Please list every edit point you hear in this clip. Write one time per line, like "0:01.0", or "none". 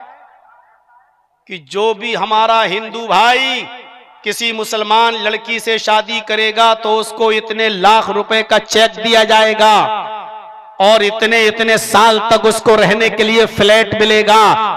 none